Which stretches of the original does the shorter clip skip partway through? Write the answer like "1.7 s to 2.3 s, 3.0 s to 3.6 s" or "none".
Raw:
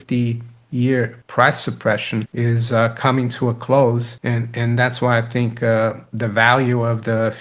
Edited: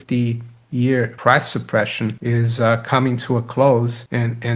1.1 s to 1.3 s